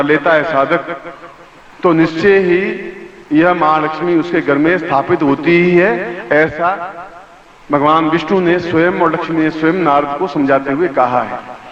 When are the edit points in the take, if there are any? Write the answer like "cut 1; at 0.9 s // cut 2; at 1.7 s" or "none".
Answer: none